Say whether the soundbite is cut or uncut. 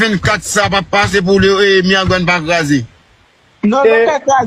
uncut